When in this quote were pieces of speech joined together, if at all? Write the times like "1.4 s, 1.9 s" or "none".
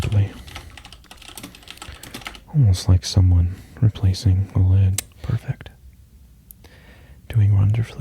5.1 s